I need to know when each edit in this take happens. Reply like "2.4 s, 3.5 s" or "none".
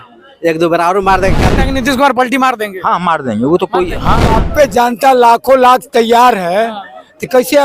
1.6 s, 4.3 s

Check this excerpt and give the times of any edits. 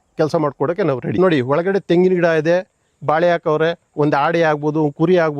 1.1 s

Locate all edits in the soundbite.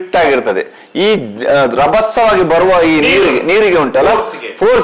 none

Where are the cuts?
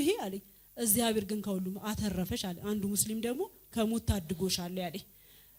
none

